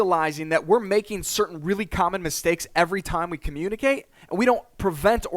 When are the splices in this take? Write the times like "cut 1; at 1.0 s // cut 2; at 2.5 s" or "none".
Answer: cut 1; at 4.2 s